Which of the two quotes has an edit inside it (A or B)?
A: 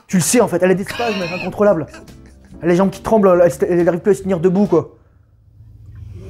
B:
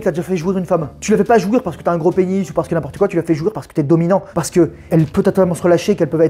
B